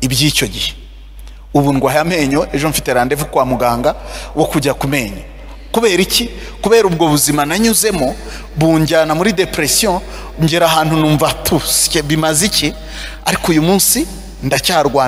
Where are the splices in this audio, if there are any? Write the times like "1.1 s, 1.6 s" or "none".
none